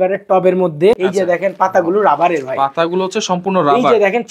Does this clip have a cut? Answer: yes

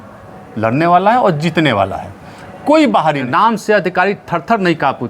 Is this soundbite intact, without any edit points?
no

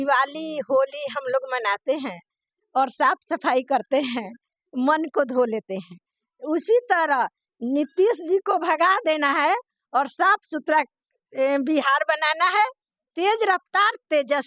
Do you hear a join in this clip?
no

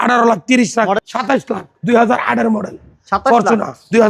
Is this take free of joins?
no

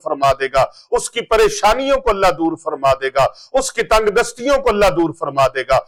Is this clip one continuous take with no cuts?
yes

